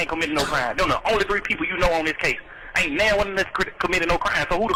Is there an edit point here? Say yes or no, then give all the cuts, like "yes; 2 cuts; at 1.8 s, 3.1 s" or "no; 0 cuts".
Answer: no; 0 cuts